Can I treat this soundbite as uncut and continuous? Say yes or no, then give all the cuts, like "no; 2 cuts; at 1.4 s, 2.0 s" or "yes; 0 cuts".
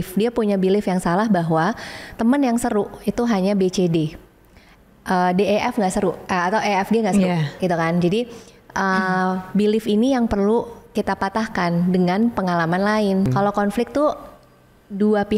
no; 1 cut; at 13.3 s